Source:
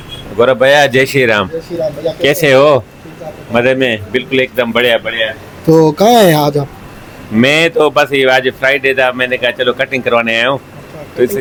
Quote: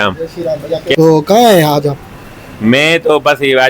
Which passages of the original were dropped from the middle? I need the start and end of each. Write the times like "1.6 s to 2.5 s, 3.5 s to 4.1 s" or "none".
2.3 s to 5.7 s